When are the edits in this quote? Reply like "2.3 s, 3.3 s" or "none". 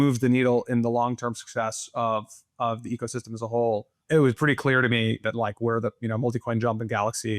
3.9 s